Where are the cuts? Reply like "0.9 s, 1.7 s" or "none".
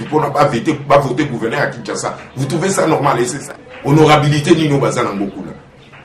3.4 s